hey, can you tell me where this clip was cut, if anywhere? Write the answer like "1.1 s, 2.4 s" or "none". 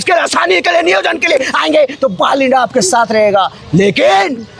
none